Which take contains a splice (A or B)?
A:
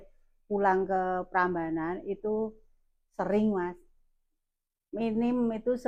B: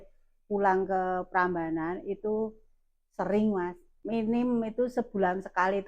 B